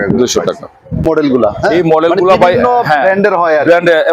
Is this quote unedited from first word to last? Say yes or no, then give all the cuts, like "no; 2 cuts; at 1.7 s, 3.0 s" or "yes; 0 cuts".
no; 1 cut; at 1.1 s